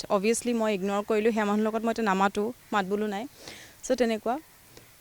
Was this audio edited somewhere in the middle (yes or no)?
no